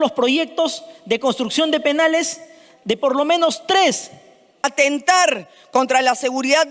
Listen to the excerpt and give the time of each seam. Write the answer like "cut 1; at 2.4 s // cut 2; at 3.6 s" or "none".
cut 1; at 4.6 s